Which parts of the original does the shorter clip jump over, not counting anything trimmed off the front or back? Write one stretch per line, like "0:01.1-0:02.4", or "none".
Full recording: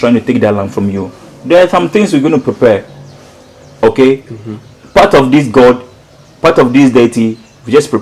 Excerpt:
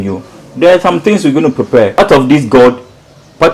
0:02.9-0:05.0